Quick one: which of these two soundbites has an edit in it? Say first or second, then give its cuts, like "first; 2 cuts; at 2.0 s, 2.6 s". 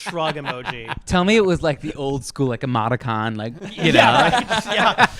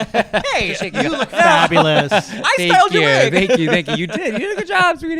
first; 2 cuts; at 0.9 s, 3.8 s